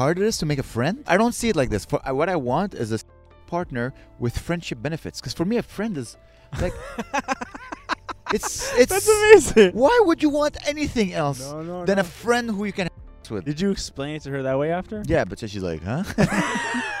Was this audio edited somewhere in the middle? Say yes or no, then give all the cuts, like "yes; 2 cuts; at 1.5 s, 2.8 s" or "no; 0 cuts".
yes; 3 cuts; at 1.0 s, 9.7 s, 13.4 s